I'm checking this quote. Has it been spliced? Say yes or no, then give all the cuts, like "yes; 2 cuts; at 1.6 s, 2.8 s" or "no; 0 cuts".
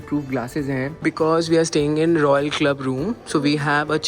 yes; 1 cut; at 0.9 s